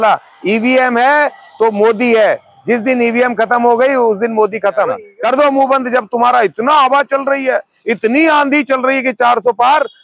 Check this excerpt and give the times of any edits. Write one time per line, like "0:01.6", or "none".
0:05.1